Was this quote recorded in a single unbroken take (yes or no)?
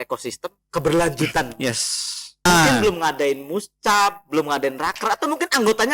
no